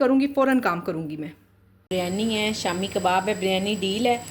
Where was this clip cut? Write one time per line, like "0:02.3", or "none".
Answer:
0:01.9